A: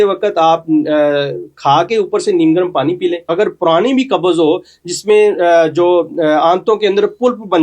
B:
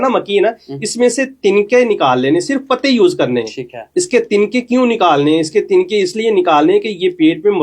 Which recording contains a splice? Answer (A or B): A